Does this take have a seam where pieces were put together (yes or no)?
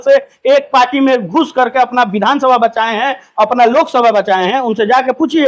no